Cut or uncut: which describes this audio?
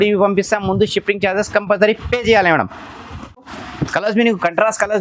cut